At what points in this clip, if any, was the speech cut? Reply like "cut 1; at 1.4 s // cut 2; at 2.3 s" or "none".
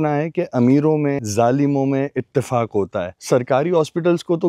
cut 1; at 1.2 s // cut 2; at 3.1 s